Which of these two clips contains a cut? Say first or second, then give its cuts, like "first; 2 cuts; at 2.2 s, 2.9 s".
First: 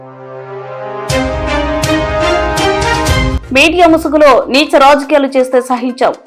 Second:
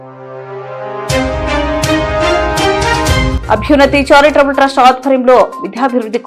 second; 1 cut; at 3.3 s